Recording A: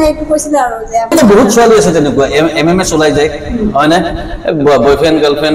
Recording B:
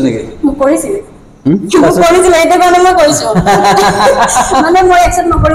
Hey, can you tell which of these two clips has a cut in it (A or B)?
A